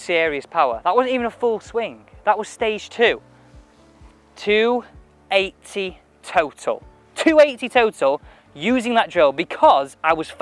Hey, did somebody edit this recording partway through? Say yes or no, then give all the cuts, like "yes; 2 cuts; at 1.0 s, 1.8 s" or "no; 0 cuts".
no; 0 cuts